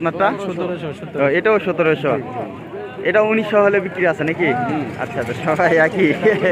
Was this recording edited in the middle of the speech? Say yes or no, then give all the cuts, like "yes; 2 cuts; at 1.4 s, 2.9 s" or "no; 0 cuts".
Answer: no; 0 cuts